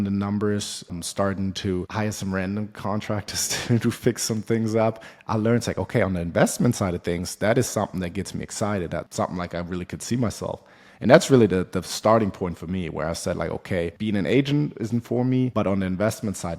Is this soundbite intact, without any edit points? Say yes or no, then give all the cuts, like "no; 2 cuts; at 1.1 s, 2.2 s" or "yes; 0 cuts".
no; 2 cuts; at 0.9 s, 9.1 s